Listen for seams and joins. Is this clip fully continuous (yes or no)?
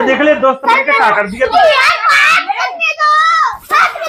yes